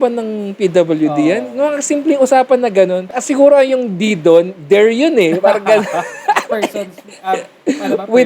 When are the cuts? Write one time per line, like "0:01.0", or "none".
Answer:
0:03.1